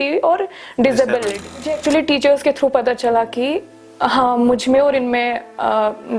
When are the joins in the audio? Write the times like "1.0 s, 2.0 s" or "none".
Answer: 1.7 s